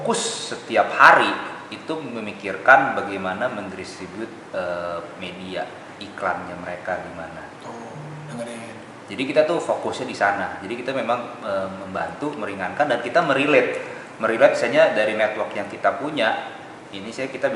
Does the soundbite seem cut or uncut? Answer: uncut